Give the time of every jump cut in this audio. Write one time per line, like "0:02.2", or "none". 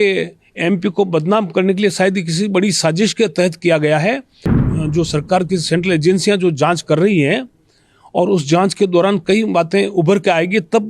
0:04.7